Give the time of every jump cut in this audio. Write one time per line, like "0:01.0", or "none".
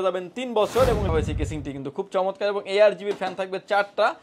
0:01.1